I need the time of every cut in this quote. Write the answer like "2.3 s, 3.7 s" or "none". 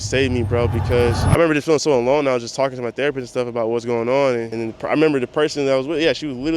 1.2 s, 4.5 s